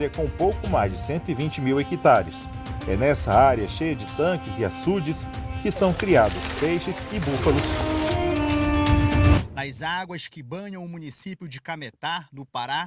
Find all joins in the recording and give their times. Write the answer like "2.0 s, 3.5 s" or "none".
9.4 s